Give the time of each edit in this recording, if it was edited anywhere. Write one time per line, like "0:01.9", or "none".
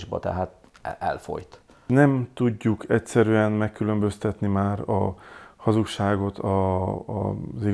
0:01.7